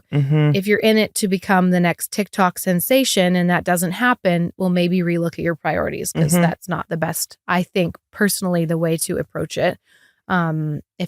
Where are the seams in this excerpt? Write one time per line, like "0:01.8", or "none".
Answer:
none